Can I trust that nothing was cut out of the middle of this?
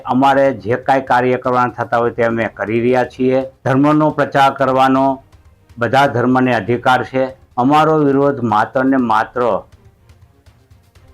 no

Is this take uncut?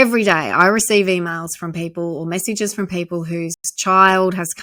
yes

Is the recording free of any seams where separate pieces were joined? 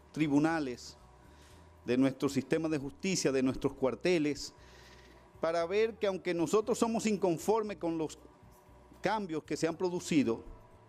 no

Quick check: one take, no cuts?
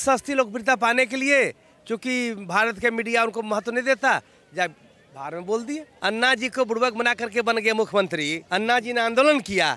no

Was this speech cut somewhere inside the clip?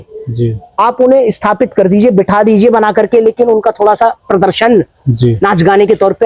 no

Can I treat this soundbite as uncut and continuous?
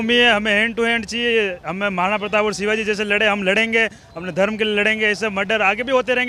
yes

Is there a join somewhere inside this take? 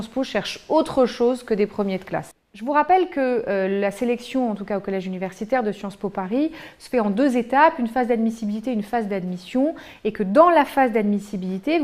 yes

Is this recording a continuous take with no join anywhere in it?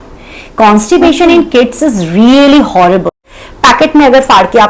no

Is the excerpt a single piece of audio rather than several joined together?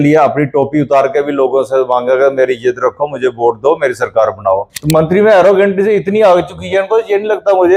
no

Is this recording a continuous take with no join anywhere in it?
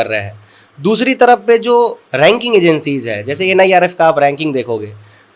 yes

